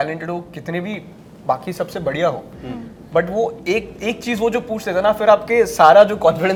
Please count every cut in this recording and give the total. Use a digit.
0